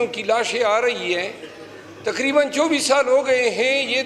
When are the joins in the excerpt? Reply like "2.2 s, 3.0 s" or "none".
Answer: none